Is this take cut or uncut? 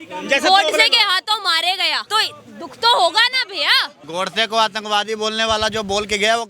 cut